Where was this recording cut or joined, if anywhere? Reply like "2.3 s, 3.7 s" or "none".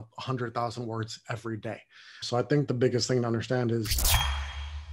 2.2 s, 4.0 s